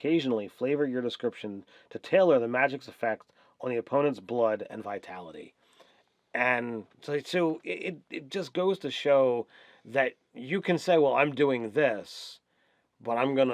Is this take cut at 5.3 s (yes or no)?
yes